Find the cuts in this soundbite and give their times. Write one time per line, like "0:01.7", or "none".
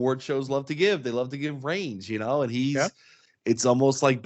none

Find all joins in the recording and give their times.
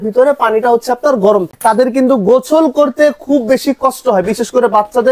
0:01.5

